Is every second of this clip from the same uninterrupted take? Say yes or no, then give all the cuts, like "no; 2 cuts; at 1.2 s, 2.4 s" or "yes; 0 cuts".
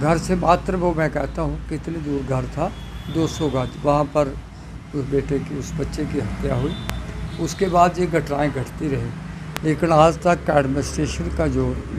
yes; 0 cuts